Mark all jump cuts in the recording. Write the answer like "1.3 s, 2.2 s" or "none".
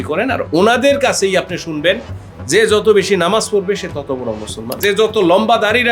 4.8 s